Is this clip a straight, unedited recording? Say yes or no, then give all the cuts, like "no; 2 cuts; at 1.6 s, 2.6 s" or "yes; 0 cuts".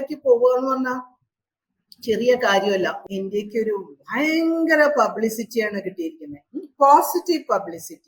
no; 1 cut; at 3.0 s